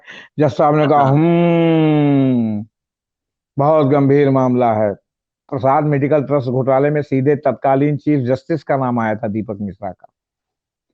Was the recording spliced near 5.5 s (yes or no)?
yes